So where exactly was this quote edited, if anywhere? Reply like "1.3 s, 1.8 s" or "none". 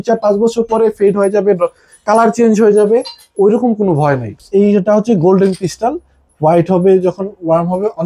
4.3 s